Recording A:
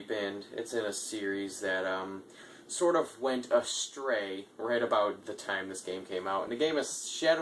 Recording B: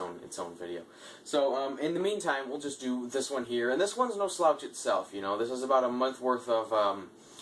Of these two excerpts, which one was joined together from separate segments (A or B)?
B